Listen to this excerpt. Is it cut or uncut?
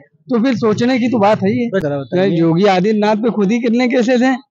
cut